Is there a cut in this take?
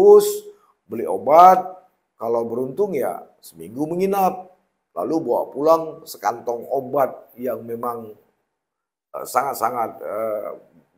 no; 0 cuts

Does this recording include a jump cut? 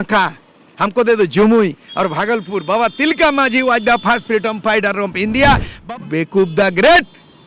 yes; 1 cut; at 5.7 s

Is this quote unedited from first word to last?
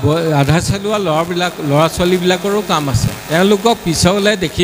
no; 1 cut; at 3.1 s

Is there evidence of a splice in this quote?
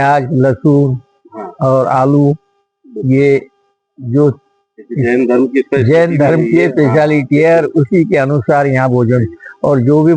no; 0 cuts

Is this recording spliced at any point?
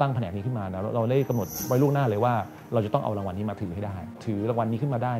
yes; 2 cuts; at 1.5 s, 4.2 s

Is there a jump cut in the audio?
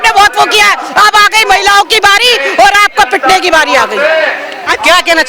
no; 0 cuts

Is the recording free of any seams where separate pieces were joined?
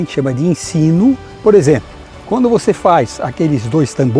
no; 1 cut; at 1.3 s

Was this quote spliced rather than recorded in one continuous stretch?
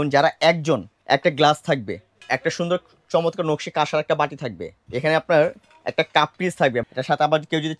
yes; 4 cuts; at 0.9 s, 2.1 s, 4.7 s, 6.8 s

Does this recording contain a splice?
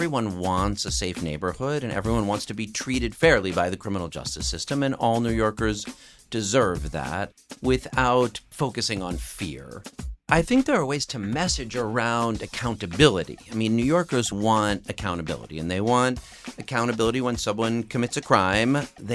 yes; 2 cuts; at 7.3 s, 10.2 s

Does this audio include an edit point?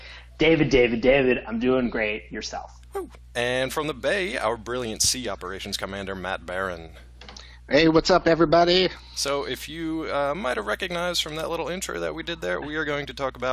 no; 0 cuts

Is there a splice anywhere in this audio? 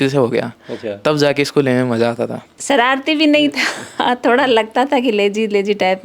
yes; 1 cut; at 2.5 s

